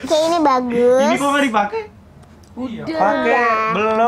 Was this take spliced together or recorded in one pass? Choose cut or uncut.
uncut